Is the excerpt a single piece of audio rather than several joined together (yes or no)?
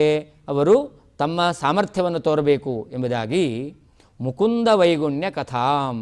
yes